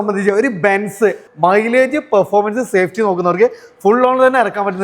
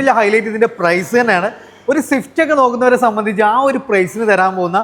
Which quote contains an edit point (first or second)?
first